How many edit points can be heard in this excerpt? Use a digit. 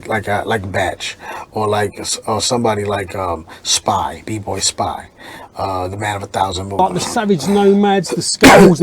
1